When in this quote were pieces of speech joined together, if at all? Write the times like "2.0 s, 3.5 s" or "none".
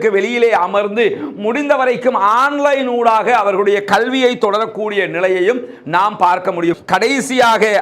6.8 s